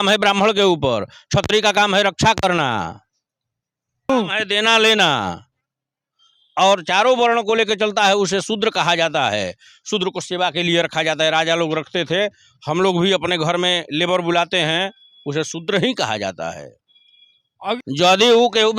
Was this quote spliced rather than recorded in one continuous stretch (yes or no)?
yes